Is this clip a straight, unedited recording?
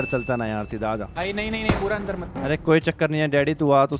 yes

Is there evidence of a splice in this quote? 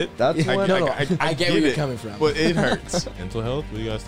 yes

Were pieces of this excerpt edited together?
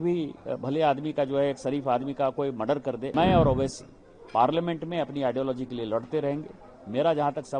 yes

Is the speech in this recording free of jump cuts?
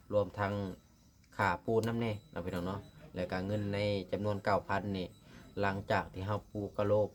yes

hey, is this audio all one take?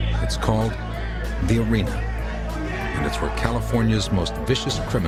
yes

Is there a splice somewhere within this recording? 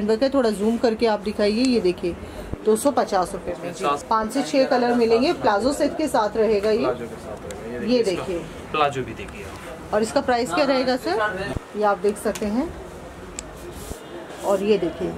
yes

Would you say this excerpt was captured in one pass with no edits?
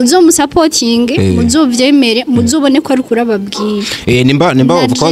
yes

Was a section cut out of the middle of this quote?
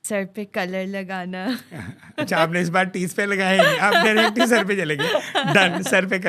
no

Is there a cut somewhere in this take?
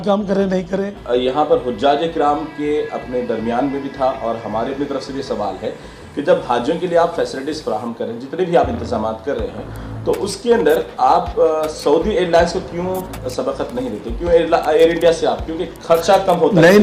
yes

